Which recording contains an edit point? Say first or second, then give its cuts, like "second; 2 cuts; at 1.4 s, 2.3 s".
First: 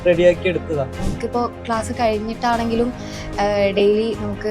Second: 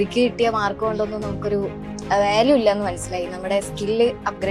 first; 1 cut; at 1.0 s